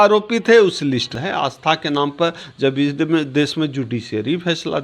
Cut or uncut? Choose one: cut